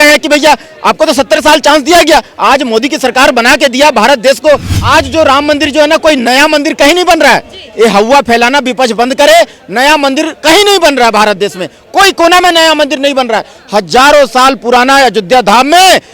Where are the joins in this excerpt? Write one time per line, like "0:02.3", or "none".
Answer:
0:04.7